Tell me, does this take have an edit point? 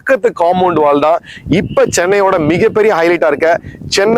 no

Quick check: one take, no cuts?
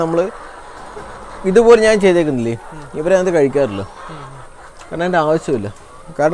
yes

